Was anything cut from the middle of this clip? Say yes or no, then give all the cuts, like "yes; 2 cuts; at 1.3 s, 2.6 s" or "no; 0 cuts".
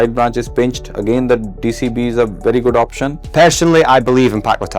yes; 1 cut; at 3.2 s